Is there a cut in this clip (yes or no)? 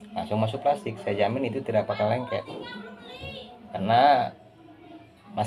yes